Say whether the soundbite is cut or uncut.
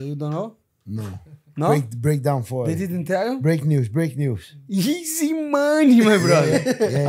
uncut